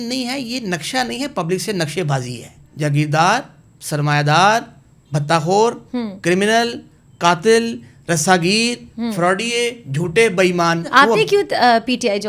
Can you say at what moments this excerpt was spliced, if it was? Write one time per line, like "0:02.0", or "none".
0:02.7
0:10.9